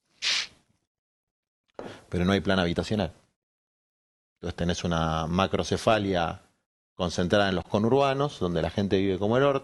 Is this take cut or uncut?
uncut